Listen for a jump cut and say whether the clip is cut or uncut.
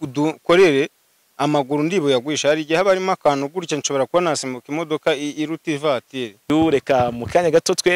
cut